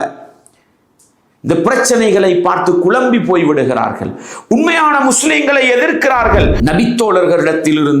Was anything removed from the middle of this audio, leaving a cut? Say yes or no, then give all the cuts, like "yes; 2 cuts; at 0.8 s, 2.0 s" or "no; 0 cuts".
yes; 1 cut; at 6.6 s